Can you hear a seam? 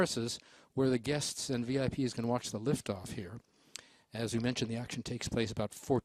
no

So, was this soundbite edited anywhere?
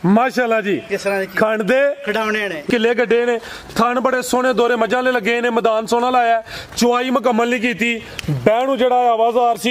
yes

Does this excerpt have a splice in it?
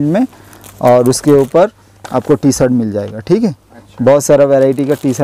no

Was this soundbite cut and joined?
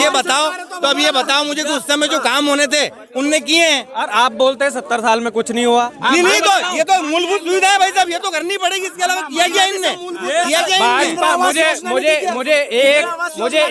no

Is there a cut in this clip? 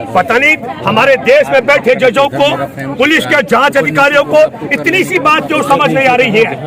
no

